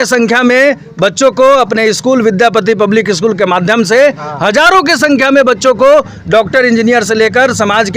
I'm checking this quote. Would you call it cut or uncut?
uncut